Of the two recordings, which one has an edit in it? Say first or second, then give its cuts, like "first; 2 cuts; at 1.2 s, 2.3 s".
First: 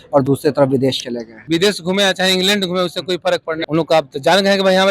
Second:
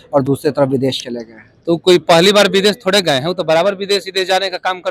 first; 2 cuts; at 1.4 s, 3.6 s